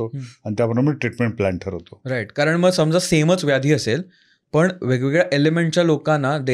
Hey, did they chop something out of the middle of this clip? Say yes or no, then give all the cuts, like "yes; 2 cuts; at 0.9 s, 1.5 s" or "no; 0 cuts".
no; 0 cuts